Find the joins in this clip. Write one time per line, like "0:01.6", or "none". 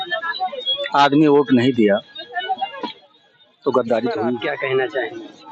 0:04.4

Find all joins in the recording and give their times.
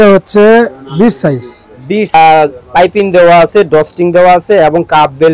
0:02.1

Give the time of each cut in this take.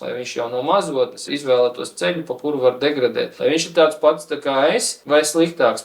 0:01.2
0:03.3
0:04.9

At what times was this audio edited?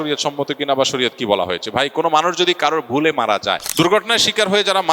0:03.6

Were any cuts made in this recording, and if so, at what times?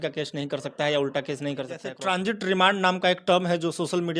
0:01.9

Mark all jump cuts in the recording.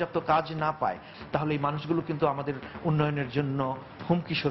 0:01.1

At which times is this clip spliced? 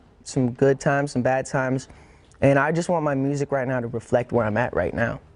0:01.4

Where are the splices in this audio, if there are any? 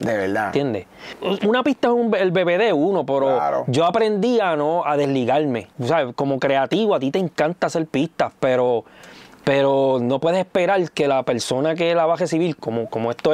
0:01.1
0:05.7

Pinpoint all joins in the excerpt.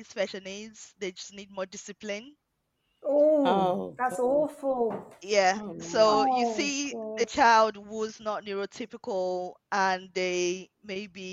none

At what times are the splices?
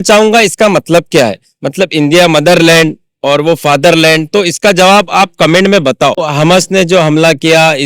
0:06.2

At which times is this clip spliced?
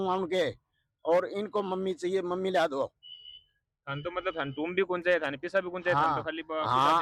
none

